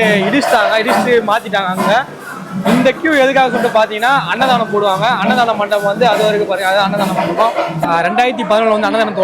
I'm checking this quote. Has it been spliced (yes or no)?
yes